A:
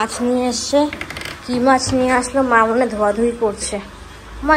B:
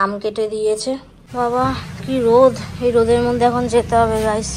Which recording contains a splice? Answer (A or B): B